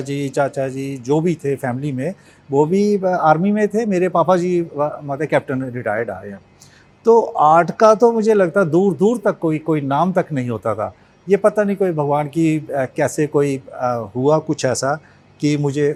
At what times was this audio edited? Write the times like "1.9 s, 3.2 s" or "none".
none

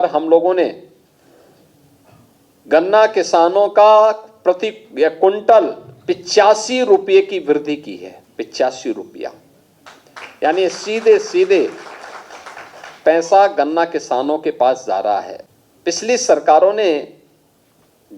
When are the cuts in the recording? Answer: 15.4 s

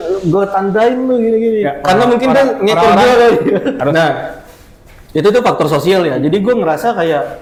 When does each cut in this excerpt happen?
none

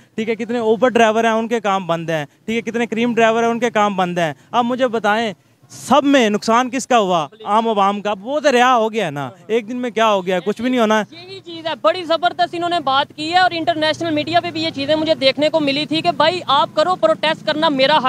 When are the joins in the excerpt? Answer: none

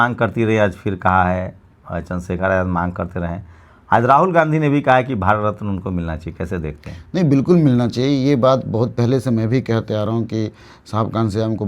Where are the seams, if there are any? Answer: none

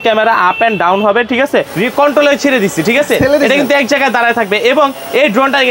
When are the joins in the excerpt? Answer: 1.7 s

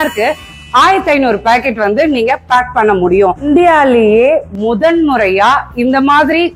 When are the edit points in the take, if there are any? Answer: none

